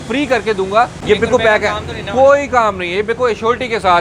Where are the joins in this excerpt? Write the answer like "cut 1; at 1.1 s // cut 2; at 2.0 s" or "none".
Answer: cut 1; at 1.0 s